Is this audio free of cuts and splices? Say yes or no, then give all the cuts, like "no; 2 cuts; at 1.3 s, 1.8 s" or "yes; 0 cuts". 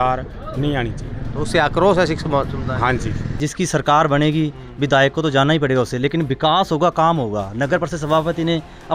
no; 1 cut; at 3.4 s